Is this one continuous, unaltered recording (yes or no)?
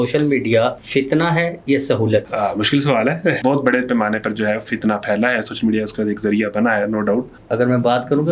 no